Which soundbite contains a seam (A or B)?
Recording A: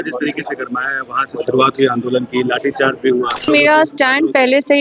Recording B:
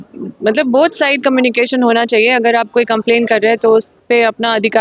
A